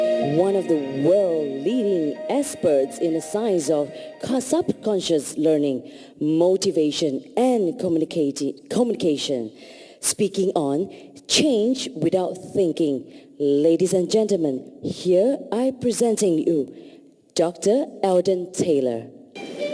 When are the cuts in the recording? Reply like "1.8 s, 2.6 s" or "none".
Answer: 7.6 s